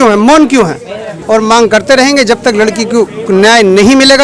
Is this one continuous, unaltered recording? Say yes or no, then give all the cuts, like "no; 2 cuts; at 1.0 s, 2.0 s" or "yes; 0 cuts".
no; 1 cut; at 1.2 s